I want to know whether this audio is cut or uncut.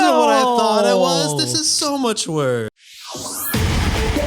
cut